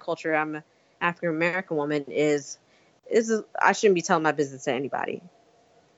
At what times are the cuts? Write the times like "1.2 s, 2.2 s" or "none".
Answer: none